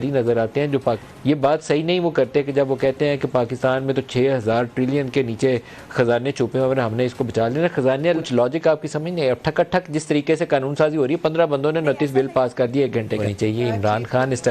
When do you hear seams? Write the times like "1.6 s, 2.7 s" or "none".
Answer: 1.0 s, 8.2 s, 13.3 s